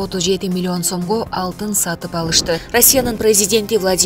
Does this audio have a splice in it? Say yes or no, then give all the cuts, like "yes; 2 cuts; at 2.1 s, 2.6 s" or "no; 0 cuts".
yes; 1 cut; at 2.6 s